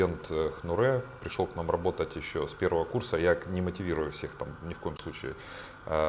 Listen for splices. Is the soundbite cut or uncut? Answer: uncut